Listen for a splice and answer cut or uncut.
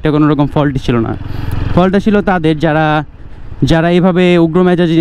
uncut